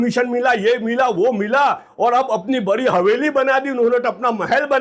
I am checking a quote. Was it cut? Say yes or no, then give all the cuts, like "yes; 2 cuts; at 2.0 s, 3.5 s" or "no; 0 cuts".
no; 0 cuts